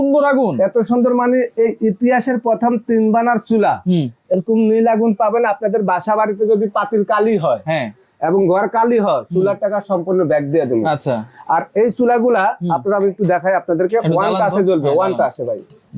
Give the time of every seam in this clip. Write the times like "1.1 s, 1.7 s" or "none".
none